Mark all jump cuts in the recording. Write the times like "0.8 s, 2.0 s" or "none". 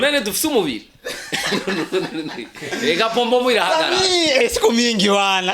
none